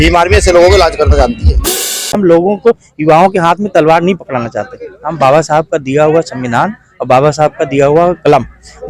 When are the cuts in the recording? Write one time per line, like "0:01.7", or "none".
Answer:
0:02.2